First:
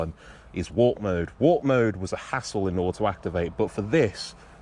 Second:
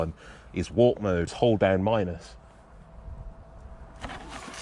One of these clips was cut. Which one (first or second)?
second